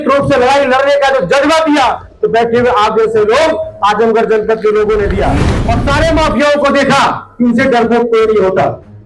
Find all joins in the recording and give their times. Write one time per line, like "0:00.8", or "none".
0:05.5